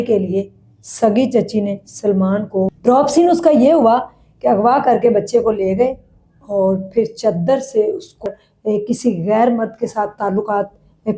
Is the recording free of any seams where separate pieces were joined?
no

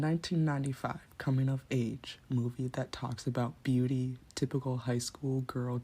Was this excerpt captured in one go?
yes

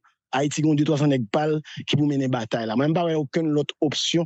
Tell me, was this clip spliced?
no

